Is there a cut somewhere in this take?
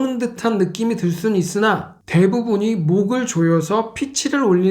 yes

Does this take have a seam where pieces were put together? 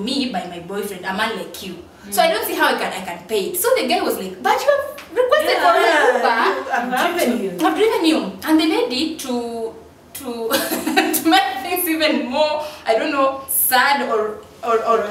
no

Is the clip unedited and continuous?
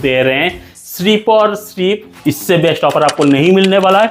no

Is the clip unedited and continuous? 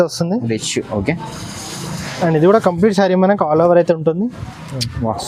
yes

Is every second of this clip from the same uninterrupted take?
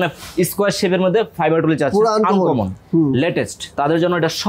yes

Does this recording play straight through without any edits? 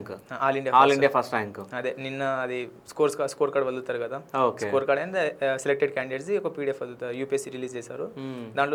yes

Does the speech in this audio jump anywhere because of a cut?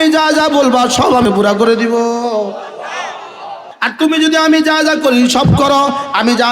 yes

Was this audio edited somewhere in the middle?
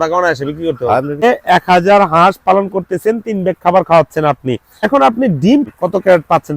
yes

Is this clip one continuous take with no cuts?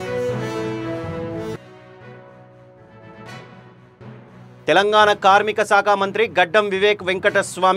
no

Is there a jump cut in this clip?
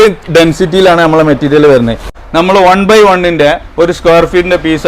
yes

